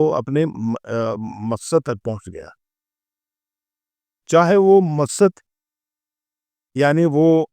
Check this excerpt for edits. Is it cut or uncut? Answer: uncut